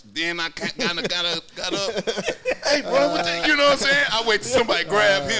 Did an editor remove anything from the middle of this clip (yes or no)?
no